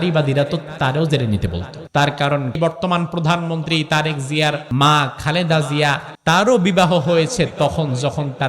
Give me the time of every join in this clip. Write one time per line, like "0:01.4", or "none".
0:01.7
0:02.6
0:04.6
0:06.1